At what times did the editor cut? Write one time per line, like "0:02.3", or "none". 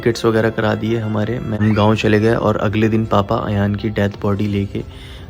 0:01.5